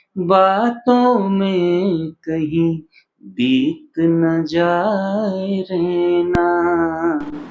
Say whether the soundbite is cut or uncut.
uncut